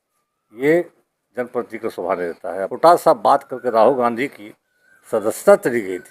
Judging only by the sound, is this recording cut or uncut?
cut